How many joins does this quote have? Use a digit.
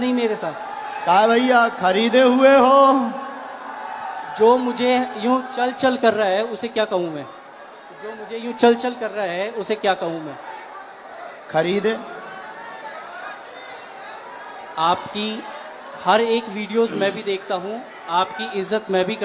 0